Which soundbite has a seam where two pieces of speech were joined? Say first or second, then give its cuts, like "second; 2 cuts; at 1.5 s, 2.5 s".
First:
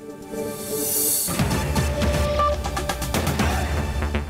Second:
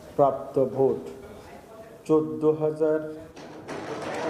first; 1 cut; at 1.3 s